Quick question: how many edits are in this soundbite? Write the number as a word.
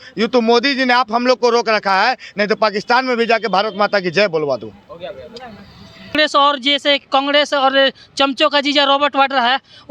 one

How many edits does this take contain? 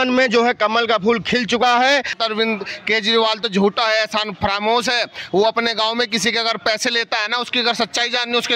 one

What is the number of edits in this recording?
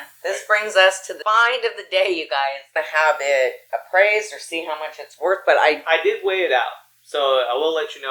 two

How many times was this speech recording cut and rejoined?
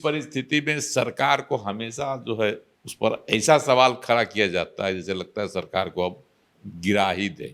one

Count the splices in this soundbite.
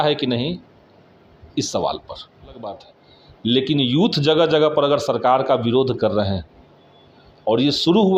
one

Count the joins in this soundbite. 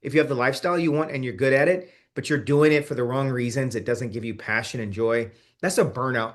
zero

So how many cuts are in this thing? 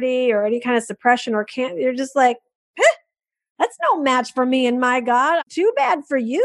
one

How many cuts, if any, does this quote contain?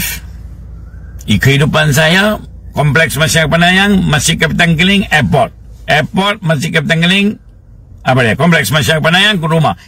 zero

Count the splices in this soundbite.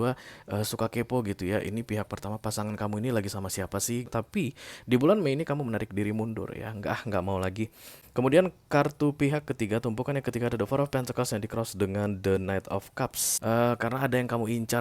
three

